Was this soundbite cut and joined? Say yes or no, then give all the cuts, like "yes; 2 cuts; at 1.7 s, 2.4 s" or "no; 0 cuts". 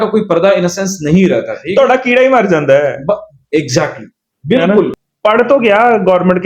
yes; 1 cut; at 5.0 s